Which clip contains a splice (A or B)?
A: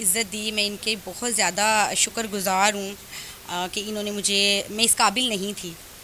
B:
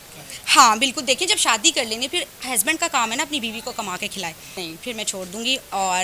B